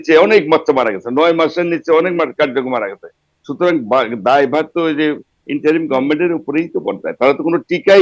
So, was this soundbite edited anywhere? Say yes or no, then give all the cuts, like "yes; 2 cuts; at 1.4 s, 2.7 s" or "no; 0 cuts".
no; 0 cuts